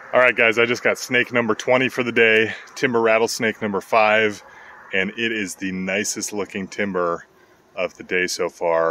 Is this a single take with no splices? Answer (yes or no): yes